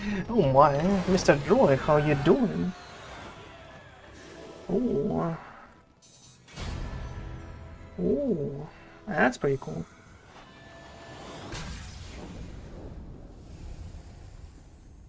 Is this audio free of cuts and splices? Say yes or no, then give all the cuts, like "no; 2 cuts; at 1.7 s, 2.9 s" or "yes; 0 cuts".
yes; 0 cuts